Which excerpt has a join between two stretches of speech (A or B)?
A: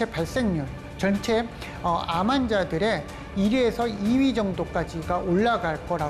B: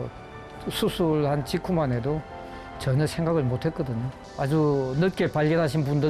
B